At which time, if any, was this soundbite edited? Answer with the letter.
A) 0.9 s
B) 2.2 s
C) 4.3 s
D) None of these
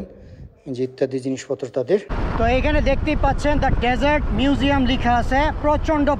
B